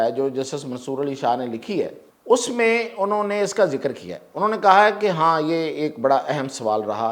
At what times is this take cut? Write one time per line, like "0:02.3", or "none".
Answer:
0:02.1